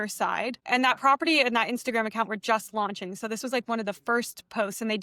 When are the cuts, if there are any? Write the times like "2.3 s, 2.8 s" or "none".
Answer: none